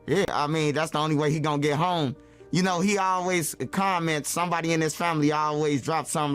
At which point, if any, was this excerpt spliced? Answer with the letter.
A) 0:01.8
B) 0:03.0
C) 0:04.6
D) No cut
D